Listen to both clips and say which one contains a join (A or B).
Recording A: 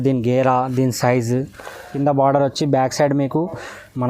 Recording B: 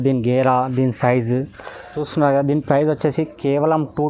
A